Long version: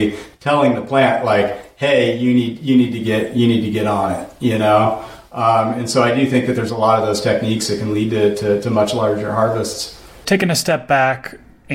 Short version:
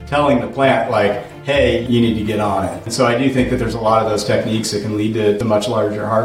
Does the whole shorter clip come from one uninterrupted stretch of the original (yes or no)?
no